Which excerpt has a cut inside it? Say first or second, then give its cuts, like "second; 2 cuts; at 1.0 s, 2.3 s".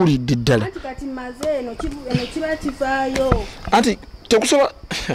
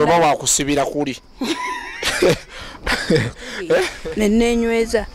second; 1 cut; at 4.0 s